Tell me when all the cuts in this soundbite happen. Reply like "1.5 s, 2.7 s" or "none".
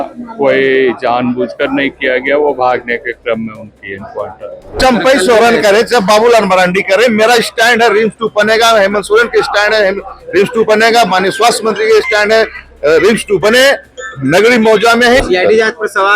4.8 s, 15.2 s